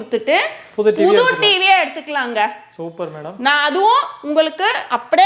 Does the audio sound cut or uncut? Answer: uncut